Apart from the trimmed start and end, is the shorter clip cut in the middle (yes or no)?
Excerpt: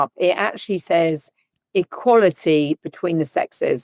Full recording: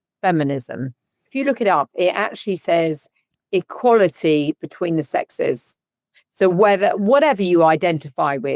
no